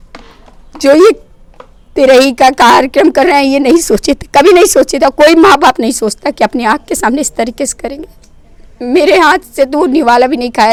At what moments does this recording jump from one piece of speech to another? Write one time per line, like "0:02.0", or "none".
none